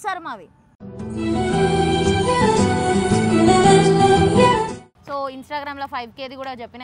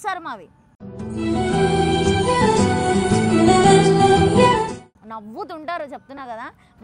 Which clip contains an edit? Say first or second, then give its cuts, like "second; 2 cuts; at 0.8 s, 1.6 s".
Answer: first; 1 cut; at 4.9 s